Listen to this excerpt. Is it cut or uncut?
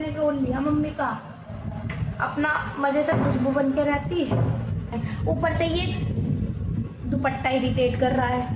cut